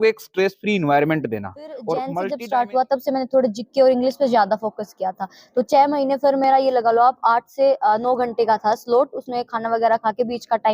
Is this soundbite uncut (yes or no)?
no